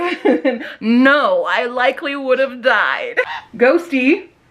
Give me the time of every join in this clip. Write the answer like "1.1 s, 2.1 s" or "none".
3.4 s